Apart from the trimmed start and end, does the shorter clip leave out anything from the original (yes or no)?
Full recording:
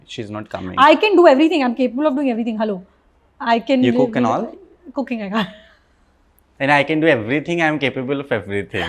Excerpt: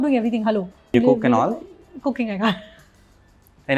yes